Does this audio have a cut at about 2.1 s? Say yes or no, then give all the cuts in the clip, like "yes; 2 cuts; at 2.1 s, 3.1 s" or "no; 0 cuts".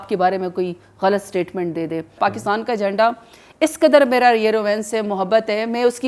yes; 1 cut; at 2.1 s